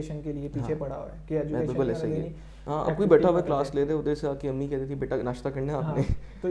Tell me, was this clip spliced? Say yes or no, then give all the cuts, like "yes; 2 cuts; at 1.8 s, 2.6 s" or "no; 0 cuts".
yes; 1 cut; at 2.6 s